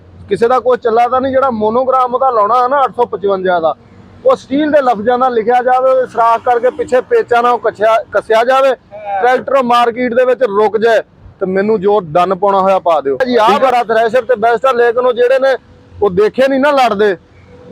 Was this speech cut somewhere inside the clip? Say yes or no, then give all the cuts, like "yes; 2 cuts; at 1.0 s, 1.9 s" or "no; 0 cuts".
yes; 1 cut; at 13.2 s